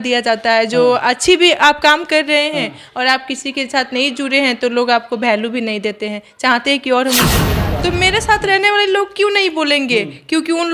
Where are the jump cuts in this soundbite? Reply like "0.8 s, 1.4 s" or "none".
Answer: 7.5 s